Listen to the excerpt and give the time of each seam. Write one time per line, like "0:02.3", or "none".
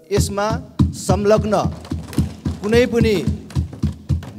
none